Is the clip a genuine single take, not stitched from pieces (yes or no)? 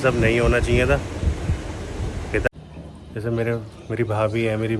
no